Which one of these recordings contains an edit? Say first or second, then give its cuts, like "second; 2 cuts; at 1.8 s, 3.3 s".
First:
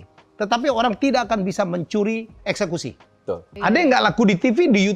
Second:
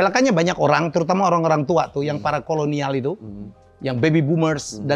first; 1 cut; at 3.5 s